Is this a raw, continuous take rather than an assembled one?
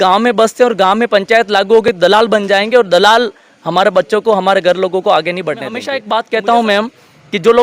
no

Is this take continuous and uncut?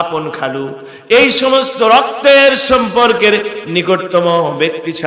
yes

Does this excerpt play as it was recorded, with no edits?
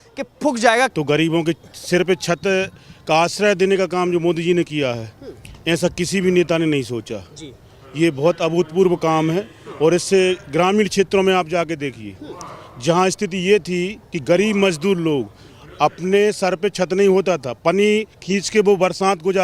no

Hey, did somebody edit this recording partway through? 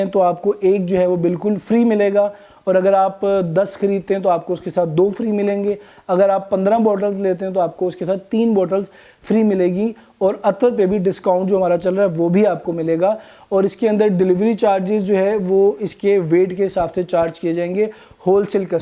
no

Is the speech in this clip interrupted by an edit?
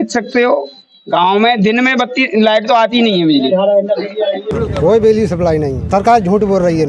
yes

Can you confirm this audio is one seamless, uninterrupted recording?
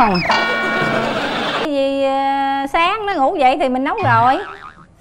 no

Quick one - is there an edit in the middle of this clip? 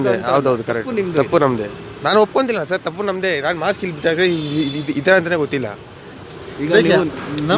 no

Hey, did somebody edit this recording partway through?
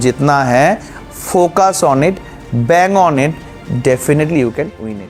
no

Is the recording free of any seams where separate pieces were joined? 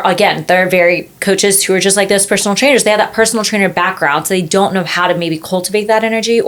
yes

